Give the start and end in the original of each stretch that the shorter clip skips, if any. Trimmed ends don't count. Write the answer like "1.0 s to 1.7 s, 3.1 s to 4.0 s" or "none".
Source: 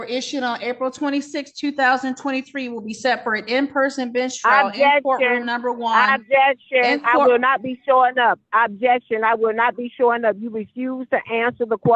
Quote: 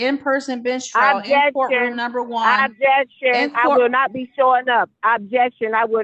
none